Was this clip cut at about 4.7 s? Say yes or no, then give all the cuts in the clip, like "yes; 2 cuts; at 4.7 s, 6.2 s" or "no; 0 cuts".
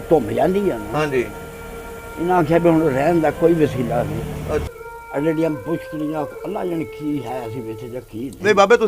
yes; 1 cut; at 4.7 s